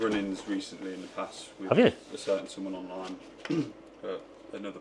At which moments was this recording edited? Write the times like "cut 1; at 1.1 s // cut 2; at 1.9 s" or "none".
none